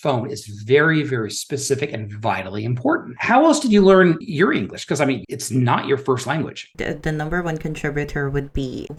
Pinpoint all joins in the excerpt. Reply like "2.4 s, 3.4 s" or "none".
none